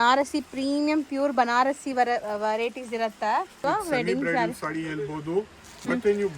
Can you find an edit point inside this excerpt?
yes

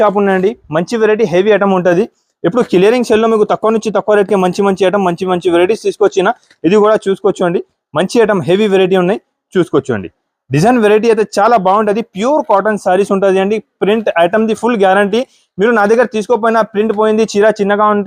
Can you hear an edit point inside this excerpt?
no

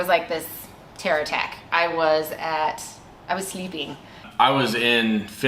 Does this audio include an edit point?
yes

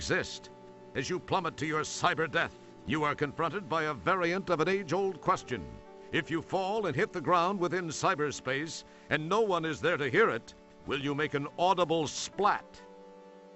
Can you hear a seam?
no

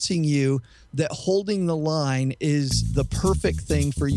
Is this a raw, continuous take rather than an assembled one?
yes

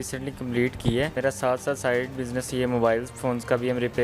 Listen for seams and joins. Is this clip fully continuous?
no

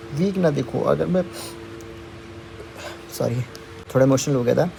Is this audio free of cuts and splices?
yes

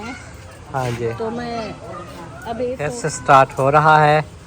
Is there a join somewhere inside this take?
yes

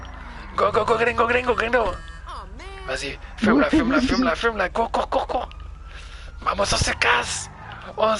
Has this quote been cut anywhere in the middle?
no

